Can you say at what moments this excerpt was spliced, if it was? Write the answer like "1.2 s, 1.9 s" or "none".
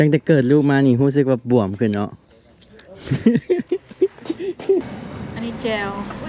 4.8 s

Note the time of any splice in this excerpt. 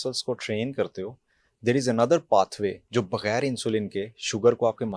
2.8 s

